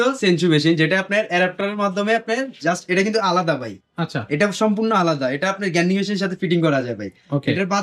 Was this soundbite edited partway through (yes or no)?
no